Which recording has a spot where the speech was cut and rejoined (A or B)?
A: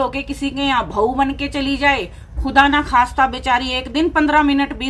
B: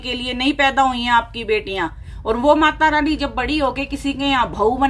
B